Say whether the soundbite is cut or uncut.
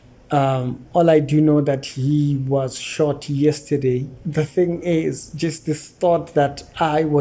cut